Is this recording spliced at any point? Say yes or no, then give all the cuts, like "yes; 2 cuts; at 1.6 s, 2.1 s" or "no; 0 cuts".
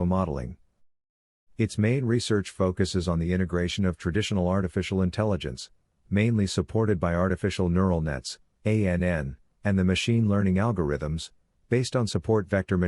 no; 0 cuts